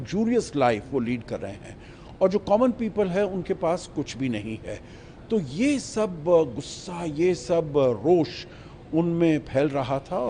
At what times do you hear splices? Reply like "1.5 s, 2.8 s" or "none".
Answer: none